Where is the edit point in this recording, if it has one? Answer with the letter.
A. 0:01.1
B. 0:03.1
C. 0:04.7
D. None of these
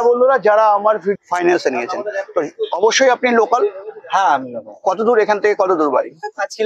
A